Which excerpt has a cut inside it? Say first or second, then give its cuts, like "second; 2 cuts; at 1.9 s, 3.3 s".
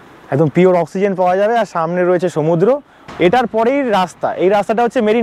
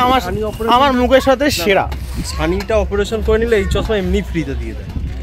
first; 1 cut; at 3.0 s